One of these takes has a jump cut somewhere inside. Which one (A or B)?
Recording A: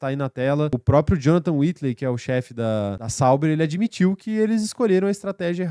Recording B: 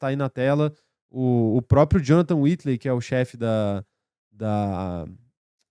A